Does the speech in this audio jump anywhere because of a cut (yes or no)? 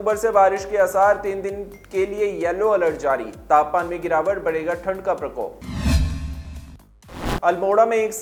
no